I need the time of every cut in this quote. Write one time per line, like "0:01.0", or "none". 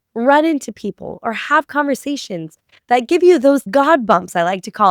0:03.7